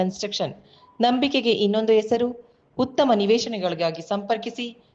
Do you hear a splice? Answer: no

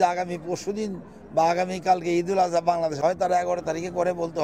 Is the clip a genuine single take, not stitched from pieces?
no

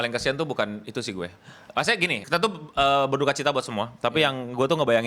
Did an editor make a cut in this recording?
no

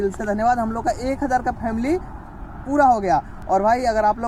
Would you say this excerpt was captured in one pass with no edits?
yes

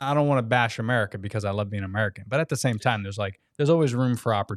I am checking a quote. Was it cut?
no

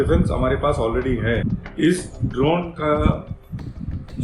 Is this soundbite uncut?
no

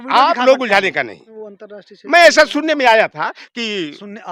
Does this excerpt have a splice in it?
yes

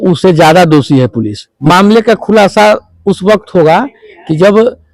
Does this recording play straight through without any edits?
no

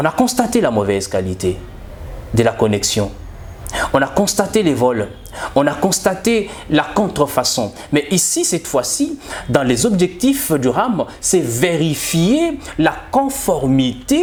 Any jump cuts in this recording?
no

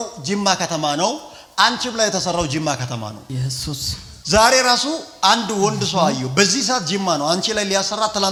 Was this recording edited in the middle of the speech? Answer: no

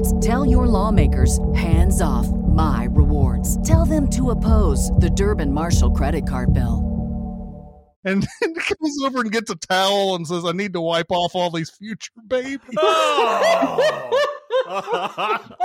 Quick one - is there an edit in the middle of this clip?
yes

